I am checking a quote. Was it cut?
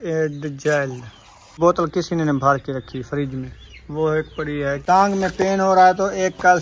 yes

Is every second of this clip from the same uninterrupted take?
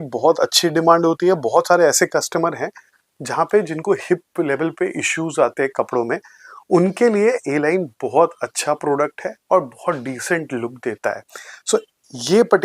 yes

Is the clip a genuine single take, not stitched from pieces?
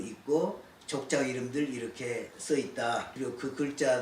no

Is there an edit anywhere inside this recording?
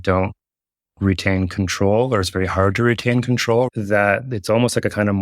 yes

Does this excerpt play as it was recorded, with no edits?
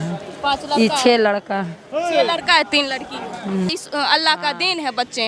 no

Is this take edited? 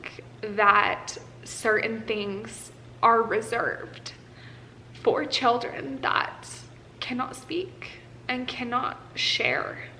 no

